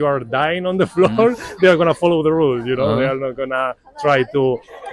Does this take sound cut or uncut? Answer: uncut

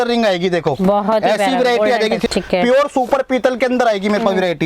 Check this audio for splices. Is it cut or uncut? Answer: cut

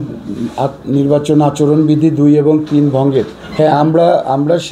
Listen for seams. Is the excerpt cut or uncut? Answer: cut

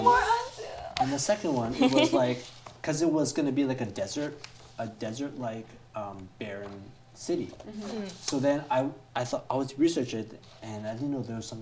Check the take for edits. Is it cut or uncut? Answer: uncut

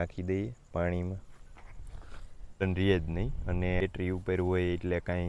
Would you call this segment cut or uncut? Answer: cut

